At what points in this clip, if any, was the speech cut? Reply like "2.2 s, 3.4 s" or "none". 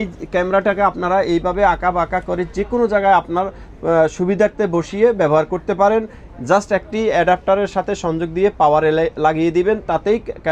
none